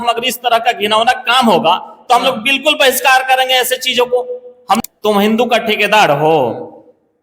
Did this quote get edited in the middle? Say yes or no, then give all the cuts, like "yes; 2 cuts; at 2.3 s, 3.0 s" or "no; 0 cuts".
yes; 1 cut; at 4.8 s